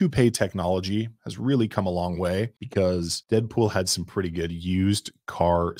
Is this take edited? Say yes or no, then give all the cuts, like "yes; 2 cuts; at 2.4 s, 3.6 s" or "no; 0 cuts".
no; 0 cuts